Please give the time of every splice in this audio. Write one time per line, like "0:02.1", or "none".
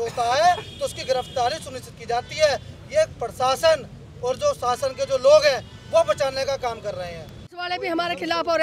0:07.5